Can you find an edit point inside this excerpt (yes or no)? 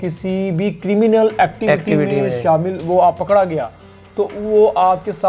no